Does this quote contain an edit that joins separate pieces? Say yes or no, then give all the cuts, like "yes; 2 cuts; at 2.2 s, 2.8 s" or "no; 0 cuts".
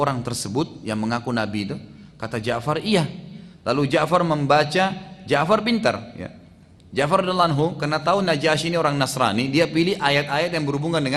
no; 0 cuts